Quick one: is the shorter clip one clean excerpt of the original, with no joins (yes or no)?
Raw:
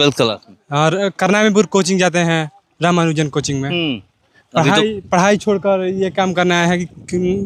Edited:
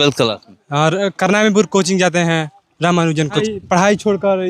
no